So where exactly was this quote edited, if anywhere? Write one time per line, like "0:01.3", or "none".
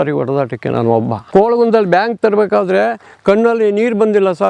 0:01.2